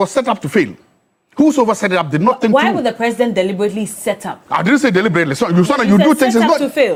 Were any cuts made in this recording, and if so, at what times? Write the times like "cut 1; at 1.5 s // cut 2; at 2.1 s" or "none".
none